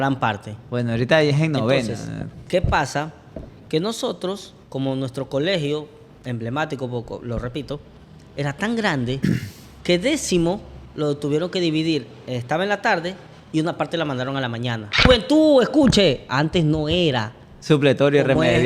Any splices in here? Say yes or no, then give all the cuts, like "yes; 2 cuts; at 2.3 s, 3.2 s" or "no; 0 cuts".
yes; 1 cut; at 15.0 s